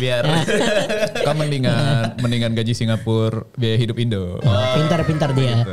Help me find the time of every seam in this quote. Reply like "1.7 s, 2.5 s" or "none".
none